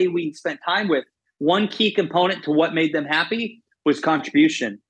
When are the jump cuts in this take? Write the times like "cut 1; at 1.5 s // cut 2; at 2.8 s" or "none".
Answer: cut 1; at 0.9 s